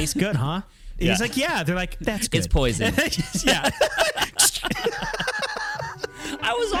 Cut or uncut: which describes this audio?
uncut